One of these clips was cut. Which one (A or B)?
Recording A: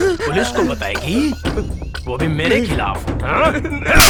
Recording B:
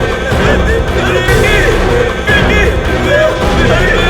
B